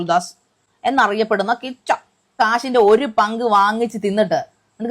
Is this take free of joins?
no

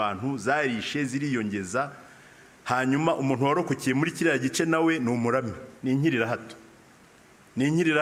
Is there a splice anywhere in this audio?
no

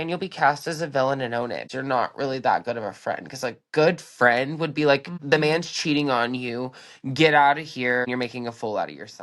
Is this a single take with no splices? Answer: no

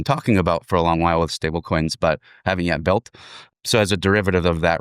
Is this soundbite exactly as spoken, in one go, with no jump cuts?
no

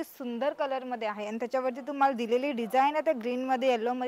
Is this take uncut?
yes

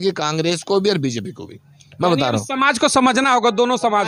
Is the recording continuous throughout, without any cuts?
yes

